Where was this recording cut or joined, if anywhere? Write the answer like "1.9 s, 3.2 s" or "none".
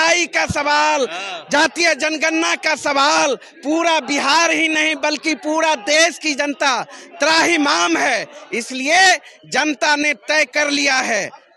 none

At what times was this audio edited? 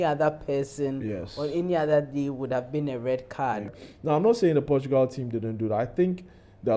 3.7 s

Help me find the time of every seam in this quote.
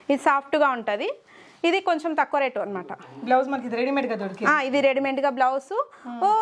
none

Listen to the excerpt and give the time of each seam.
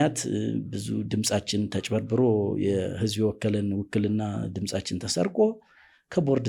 none

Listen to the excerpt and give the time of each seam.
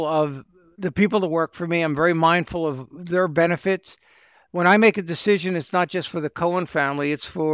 none

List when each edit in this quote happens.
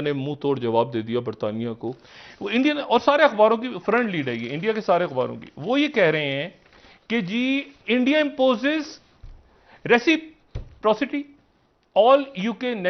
1.9 s

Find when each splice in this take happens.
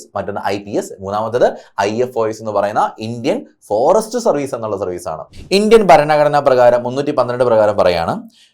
5.3 s

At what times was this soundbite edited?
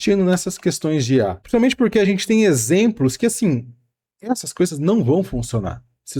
none

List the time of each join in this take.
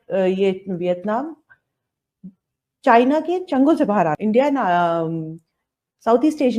4.2 s

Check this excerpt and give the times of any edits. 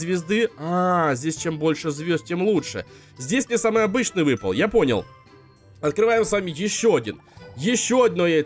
none

